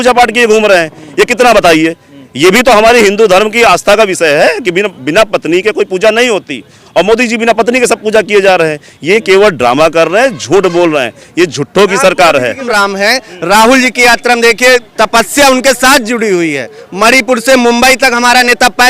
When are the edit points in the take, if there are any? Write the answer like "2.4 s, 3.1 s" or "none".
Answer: 12.7 s

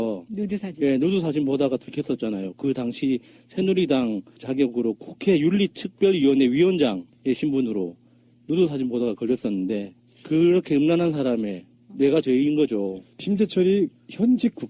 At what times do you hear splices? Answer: none

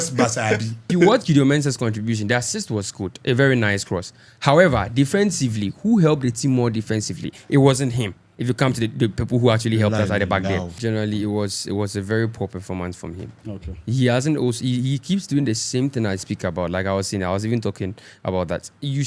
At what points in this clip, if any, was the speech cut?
0.8 s, 10.8 s

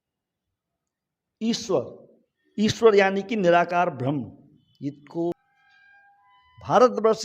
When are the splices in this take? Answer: 5.4 s

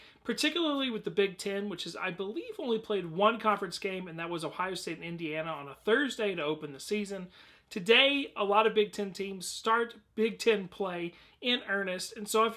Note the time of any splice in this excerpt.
4.9 s

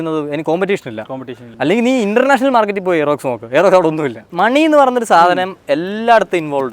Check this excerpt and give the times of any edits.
1.5 s, 4.2 s

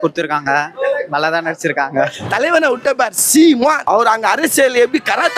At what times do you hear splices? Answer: 2.2 s, 3.8 s

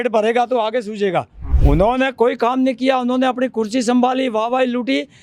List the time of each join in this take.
1.5 s

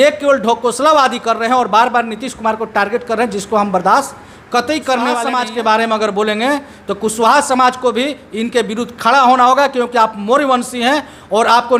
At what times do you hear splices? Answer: none

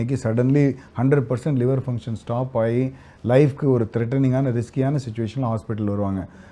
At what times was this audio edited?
none

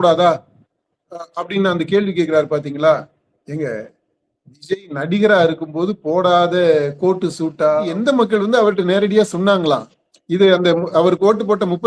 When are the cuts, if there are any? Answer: 7.9 s

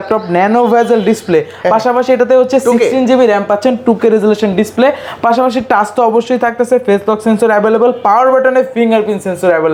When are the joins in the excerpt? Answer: none

